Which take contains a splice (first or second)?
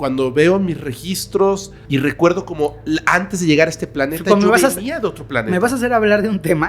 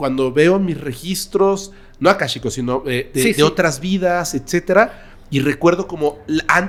first